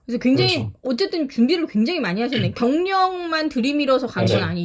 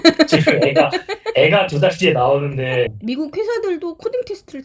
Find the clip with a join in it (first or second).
second